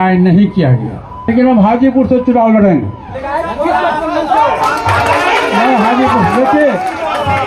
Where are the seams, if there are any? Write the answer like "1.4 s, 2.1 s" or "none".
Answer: 1.1 s